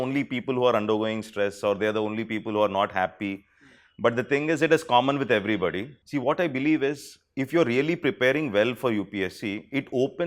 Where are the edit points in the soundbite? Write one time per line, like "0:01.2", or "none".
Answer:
0:05.9